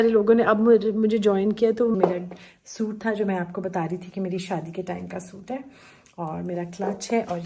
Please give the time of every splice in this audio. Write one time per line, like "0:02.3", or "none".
0:01.9